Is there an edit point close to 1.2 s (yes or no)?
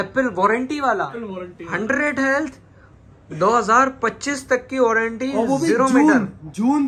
yes